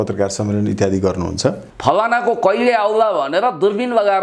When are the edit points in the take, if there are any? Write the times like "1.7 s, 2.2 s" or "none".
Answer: 1.6 s